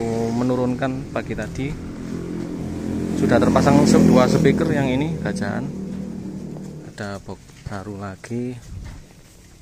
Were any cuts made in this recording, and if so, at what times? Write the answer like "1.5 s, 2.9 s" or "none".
6.9 s